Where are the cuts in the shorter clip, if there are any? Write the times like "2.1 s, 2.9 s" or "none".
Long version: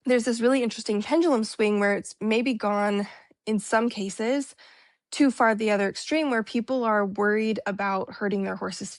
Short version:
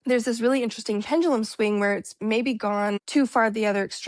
3.0 s